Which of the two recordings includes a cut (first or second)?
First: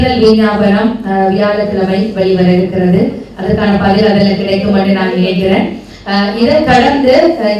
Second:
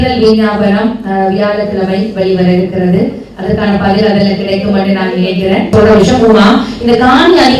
second